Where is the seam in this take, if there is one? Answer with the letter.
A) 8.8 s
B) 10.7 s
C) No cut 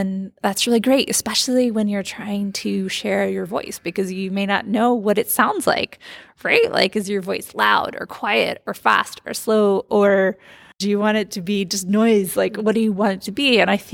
B